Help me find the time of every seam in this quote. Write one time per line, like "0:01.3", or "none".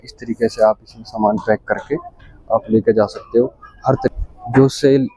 0:04.1